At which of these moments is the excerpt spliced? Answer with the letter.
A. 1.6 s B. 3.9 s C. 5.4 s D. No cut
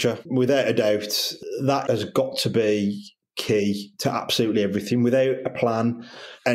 A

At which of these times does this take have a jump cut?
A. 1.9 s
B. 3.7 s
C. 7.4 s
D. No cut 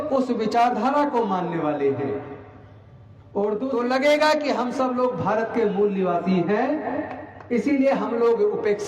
B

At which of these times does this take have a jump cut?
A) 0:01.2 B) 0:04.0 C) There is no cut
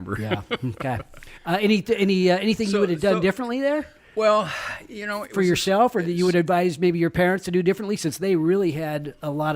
C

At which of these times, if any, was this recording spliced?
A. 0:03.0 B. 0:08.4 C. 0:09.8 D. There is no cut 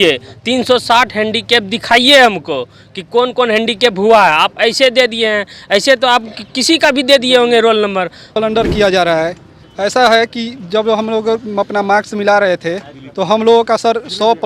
B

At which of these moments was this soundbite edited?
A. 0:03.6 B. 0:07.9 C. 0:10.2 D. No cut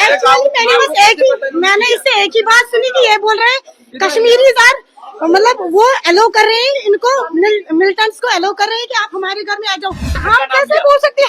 C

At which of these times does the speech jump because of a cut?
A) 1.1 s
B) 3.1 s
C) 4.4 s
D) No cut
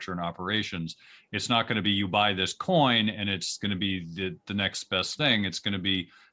D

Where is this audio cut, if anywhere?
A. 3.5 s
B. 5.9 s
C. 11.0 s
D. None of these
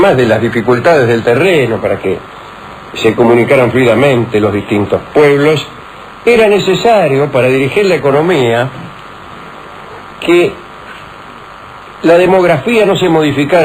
A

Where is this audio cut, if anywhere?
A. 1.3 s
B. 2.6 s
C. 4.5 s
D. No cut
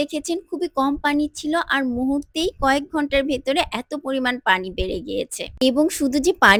D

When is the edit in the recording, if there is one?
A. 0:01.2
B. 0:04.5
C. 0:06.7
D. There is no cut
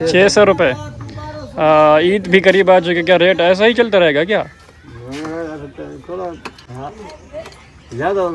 D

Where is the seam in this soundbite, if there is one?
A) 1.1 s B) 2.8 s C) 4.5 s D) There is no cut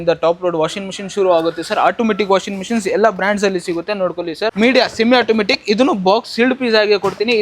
C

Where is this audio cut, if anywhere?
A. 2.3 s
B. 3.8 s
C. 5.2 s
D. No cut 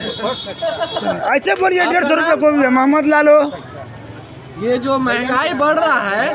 D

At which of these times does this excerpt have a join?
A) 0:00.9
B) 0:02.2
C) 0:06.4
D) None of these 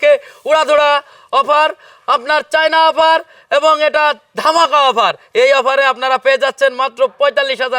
D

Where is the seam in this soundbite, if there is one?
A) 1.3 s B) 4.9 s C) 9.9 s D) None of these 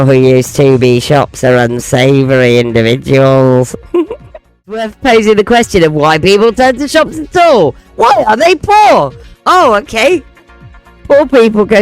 B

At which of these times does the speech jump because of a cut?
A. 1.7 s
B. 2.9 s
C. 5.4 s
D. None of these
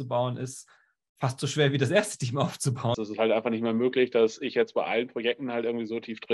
B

